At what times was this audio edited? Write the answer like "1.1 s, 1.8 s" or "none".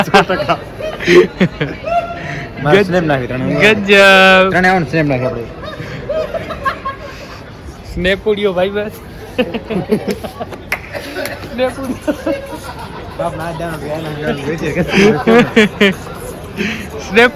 none